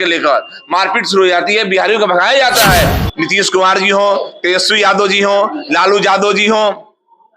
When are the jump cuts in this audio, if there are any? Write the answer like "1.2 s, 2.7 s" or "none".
3.0 s